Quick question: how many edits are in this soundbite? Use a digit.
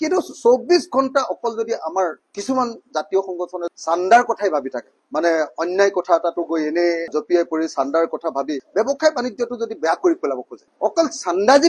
2